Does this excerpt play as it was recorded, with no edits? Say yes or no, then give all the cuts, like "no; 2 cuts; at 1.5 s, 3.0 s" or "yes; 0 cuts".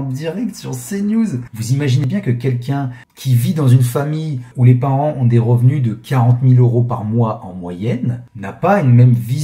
no; 1 cut; at 1.5 s